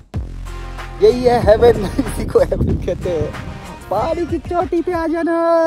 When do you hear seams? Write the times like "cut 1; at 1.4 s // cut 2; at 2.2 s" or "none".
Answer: cut 1; at 1.0 s